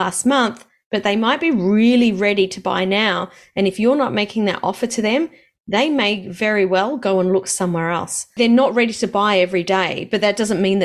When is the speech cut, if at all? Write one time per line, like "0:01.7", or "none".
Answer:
0:08.3